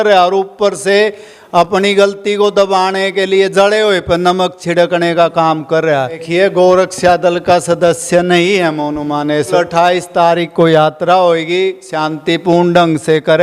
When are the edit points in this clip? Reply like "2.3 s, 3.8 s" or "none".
6.2 s, 9.5 s